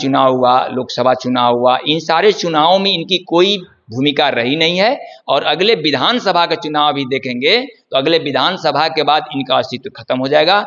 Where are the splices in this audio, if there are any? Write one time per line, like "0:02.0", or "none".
none